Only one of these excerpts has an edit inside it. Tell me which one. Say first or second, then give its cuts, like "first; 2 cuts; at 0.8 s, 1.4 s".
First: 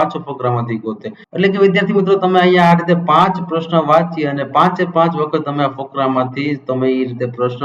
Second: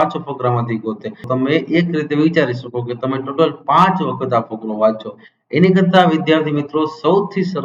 second; 1 cut; at 1.2 s